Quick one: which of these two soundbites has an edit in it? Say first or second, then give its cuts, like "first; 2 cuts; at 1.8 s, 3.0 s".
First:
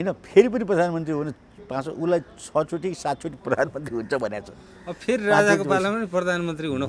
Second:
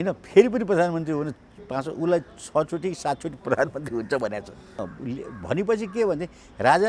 second; 1 cut; at 4.8 s